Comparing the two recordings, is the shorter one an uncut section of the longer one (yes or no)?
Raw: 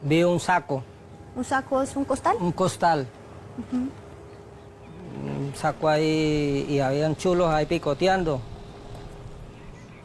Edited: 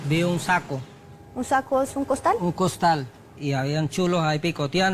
no